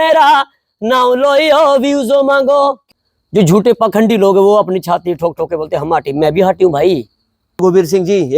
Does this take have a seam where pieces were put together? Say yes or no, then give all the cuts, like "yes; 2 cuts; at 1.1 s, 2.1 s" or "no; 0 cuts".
yes; 2 cuts; at 2.8 s, 7.6 s